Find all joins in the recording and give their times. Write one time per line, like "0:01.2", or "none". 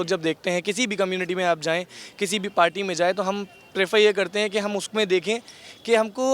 none